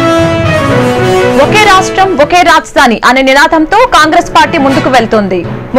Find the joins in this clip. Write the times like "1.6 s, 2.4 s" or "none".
none